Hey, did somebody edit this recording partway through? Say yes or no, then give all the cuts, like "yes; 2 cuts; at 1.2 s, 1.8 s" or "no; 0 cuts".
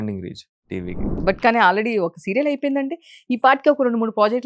yes; 1 cut; at 1.1 s